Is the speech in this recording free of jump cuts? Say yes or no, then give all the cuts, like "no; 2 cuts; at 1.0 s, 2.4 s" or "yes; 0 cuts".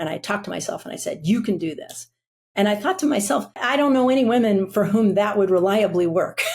no; 1 cut; at 3.6 s